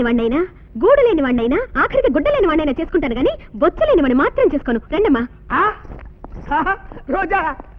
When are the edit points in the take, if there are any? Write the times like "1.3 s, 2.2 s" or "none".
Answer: none